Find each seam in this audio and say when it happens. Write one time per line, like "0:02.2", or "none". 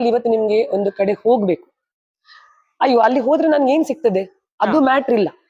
none